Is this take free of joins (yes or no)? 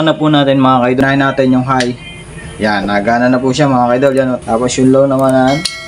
no